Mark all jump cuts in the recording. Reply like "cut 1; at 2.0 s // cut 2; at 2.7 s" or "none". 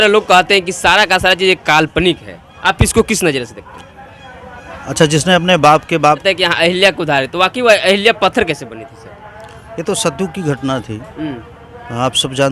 cut 1; at 6.2 s